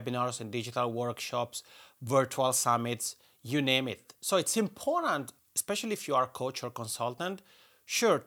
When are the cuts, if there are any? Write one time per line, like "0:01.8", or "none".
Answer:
0:05.3